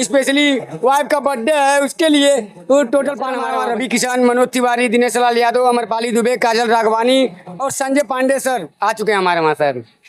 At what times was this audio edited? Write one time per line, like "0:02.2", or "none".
0:03.4